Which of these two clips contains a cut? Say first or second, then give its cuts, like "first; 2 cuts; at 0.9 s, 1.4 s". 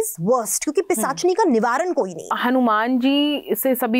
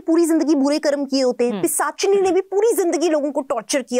first; 1 cut; at 2.3 s